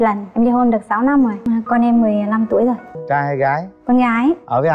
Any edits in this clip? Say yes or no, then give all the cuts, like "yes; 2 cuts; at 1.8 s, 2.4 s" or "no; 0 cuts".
yes; 1 cut; at 1.4 s